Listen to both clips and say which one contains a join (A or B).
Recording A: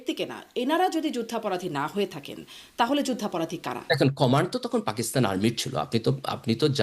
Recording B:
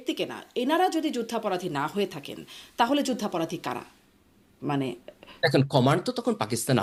A